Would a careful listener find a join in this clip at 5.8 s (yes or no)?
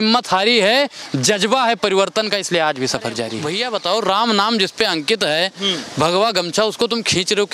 no